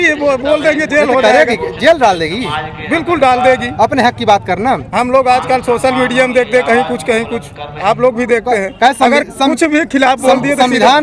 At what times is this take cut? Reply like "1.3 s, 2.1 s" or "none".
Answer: none

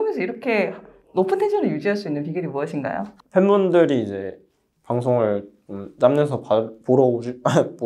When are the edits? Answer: 3.2 s

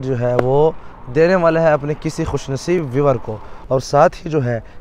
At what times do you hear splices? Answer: 3.5 s

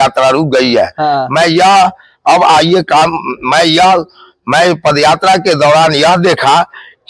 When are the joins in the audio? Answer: none

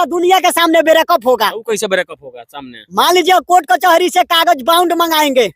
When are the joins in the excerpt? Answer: none

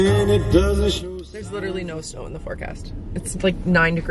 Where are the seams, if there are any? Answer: none

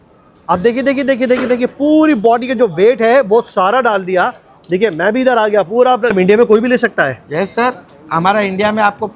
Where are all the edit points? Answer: 6.1 s

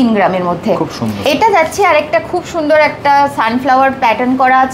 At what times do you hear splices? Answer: 1.2 s

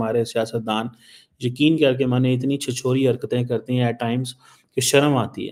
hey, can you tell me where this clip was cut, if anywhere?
none

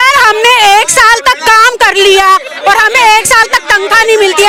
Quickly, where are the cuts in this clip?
none

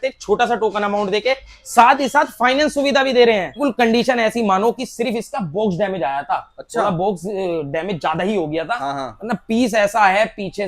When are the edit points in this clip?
3.6 s

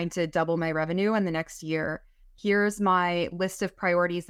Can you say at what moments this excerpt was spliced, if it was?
none

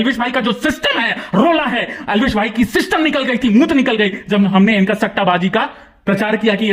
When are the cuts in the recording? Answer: none

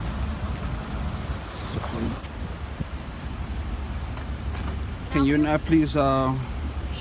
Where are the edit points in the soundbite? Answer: 2.2 s

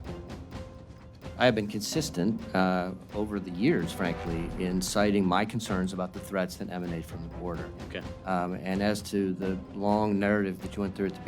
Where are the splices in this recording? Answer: 1.3 s

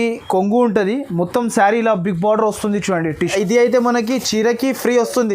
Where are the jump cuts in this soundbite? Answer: 3.3 s

